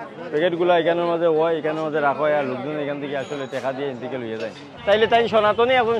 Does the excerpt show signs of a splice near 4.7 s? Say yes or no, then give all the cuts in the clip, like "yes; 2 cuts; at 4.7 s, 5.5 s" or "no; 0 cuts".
yes; 1 cut; at 4.7 s